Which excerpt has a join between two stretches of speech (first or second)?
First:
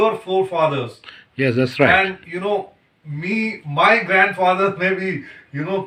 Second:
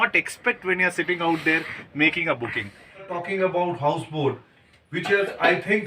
second